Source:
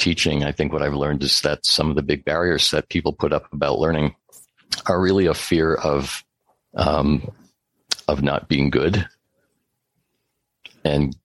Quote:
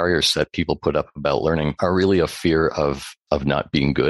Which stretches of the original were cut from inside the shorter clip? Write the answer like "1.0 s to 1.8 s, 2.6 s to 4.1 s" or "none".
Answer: 4.1 s to 4.8 s, 6.2 s to 7.9 s